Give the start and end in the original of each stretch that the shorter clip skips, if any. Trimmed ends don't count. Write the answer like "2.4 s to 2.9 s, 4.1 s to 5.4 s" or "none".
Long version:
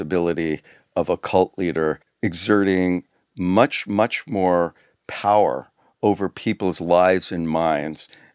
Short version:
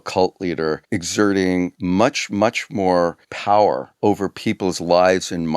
2.0 s to 2.1 s, 3.1 s to 3.3 s, 4.8 s to 5.0 s, 5.7 s to 5.9 s